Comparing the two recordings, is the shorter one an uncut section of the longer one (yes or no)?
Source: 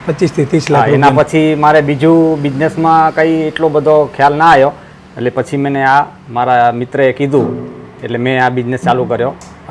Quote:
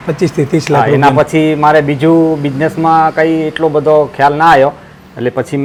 yes